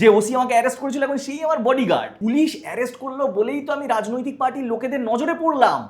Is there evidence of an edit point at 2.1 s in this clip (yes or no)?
yes